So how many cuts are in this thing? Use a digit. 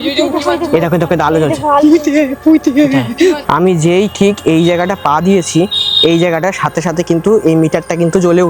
1